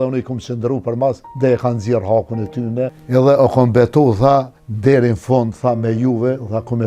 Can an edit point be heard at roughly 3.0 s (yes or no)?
yes